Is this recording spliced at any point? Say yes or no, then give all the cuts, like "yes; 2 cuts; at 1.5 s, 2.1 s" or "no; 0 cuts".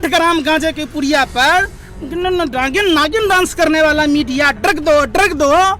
no; 0 cuts